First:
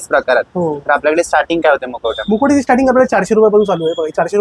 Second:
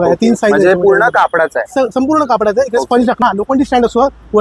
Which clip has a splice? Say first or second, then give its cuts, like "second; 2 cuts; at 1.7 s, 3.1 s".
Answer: second; 1 cut; at 3.2 s